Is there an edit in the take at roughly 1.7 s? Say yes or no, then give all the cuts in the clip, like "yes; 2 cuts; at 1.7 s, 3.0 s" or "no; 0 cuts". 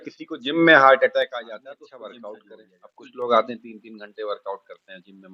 yes; 1 cut; at 1.7 s